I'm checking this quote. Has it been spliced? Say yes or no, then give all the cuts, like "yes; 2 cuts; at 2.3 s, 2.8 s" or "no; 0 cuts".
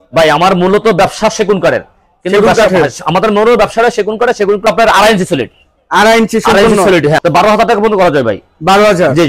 yes; 2 cuts; at 4.7 s, 7.2 s